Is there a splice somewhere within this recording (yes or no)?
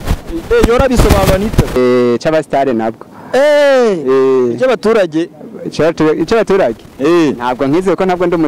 yes